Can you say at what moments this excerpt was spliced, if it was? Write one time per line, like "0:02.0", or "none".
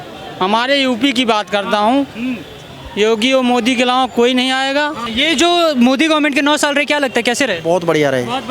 0:05.0

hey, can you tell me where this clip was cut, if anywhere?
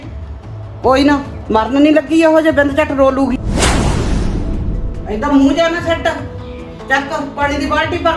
0:03.4
0:04.7

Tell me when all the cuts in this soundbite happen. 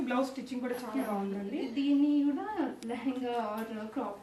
none

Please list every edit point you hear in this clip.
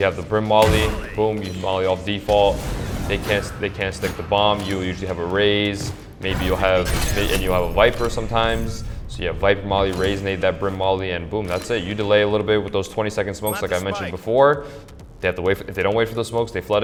none

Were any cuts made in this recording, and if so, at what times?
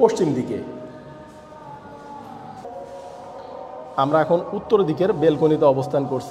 0:02.6

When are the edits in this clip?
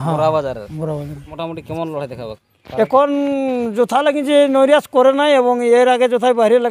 0:01.3

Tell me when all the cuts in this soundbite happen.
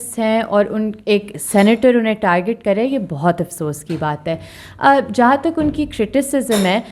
none

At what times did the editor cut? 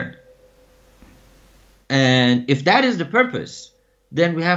none

